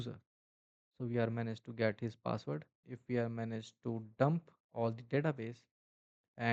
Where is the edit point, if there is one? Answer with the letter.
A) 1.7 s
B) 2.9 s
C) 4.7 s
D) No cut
B